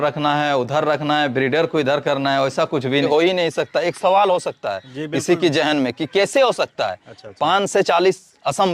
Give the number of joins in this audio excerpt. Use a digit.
1